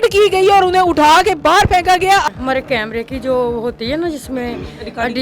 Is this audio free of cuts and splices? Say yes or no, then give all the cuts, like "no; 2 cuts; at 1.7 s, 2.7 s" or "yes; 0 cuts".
no; 1 cut; at 2.3 s